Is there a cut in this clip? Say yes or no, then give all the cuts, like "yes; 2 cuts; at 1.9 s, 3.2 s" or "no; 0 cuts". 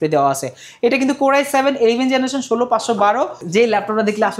yes; 1 cut; at 3.4 s